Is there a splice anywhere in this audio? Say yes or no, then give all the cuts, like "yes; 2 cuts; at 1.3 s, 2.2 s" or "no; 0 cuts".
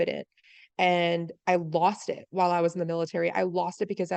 no; 0 cuts